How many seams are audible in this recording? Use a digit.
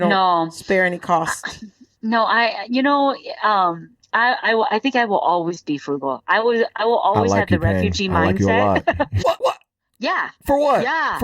1